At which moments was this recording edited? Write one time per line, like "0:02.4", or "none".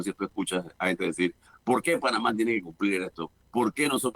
0:01.5